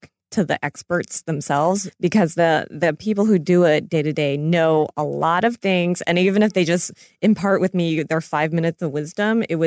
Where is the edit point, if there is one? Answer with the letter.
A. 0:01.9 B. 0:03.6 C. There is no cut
A